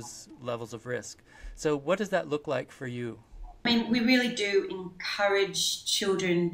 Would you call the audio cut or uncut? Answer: cut